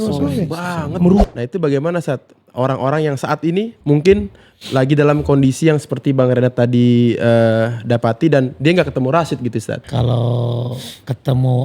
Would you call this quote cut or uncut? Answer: cut